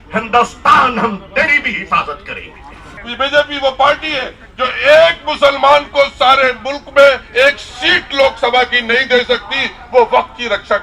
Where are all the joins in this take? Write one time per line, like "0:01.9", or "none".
0:03.0